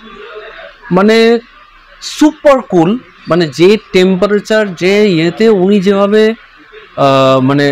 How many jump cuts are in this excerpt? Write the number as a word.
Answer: zero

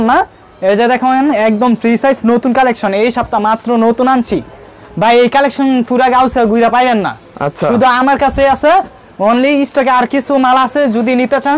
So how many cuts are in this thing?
zero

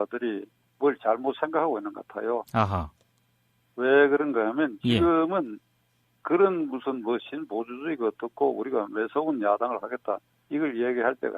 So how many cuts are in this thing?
one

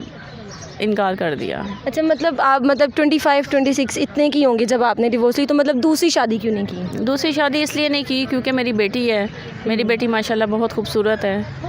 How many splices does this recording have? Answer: zero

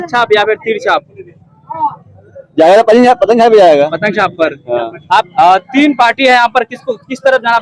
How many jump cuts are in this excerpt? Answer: one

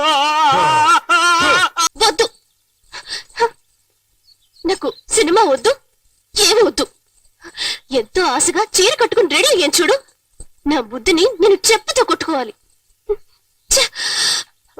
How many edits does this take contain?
one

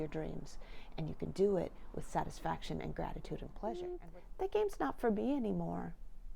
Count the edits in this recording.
one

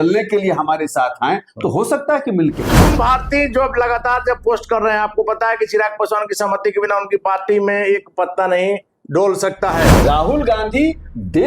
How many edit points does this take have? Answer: two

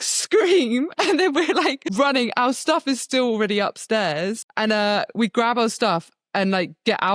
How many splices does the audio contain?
two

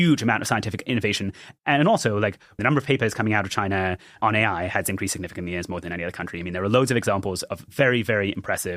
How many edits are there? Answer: three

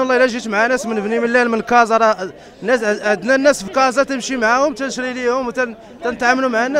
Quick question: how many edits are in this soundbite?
zero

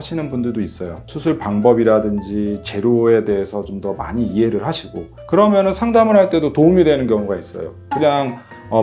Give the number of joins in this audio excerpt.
zero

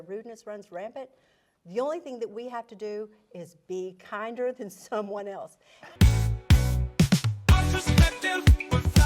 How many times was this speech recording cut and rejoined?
one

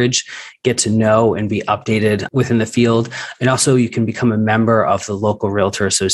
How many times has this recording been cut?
one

